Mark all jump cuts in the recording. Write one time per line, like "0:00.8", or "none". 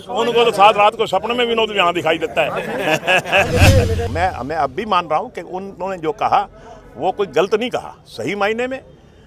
0:04.1